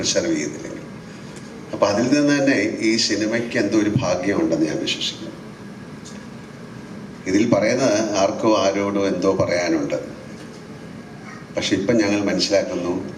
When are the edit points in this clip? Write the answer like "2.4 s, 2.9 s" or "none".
none